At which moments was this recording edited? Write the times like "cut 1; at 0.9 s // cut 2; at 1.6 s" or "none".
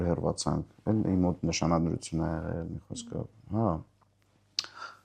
none